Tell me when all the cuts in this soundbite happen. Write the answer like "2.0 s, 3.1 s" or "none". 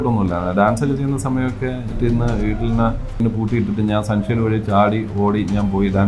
1.9 s, 3.1 s